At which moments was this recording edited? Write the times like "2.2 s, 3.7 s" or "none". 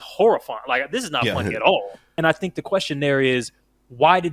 2.0 s